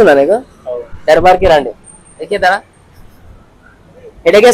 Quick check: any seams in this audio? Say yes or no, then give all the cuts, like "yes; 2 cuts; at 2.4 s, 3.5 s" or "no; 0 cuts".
no; 0 cuts